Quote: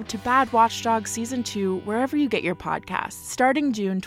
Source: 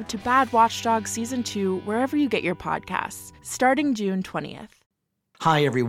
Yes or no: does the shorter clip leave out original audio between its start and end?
yes